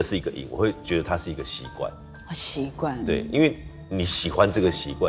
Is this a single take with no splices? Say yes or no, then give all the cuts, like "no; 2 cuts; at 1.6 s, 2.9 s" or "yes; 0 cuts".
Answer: yes; 0 cuts